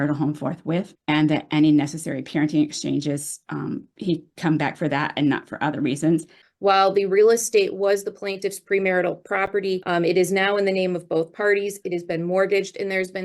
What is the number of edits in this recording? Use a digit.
3